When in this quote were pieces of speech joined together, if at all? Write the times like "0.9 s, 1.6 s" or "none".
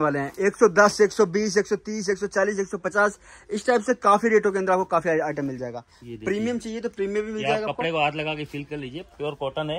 none